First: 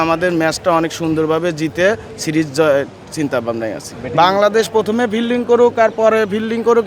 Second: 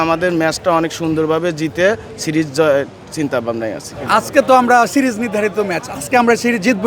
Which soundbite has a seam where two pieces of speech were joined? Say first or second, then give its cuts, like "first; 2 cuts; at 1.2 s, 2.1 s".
second; 2 cuts; at 3.9 s, 5.8 s